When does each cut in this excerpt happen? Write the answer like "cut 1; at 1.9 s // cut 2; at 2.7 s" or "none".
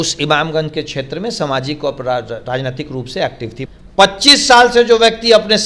cut 1; at 3.5 s